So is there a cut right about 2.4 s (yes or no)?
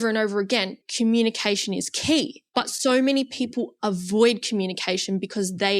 yes